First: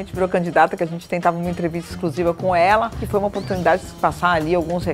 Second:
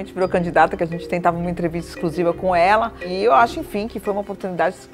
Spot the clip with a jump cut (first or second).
first